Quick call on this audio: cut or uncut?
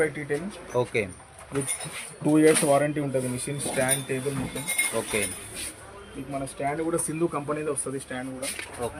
uncut